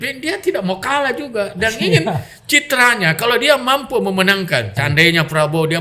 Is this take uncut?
no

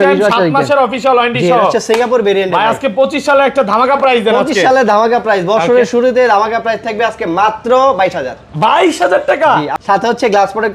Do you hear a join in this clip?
yes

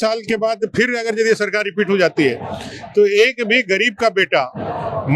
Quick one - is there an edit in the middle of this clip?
no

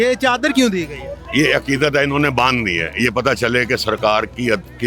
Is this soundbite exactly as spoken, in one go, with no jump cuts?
yes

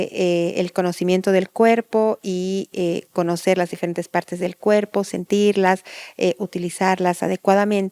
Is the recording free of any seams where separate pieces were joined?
yes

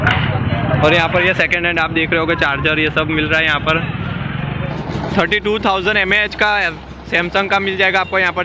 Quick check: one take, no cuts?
no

